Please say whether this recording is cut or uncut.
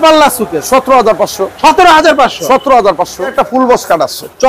cut